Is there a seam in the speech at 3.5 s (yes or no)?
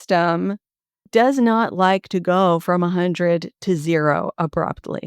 no